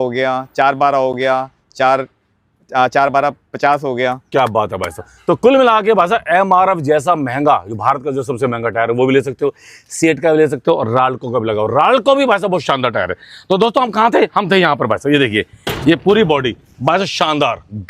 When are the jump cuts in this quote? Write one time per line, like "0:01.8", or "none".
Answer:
none